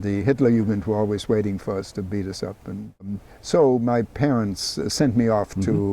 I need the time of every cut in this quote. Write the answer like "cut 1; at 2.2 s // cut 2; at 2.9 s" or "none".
cut 1; at 3.1 s